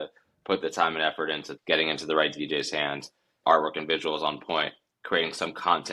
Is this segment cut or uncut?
cut